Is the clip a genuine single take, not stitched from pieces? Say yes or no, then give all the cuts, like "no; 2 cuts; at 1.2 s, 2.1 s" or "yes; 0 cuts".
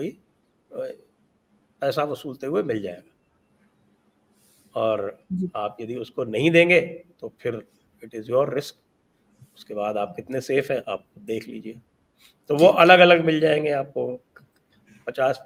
yes; 0 cuts